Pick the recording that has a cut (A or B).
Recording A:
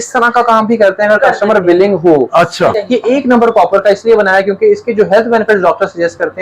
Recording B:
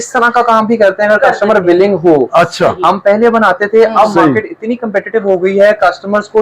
A